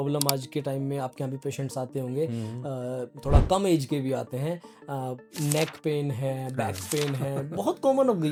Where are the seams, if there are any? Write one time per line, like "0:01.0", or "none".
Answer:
none